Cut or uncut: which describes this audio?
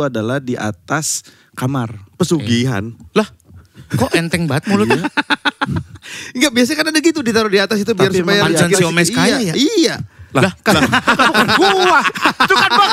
uncut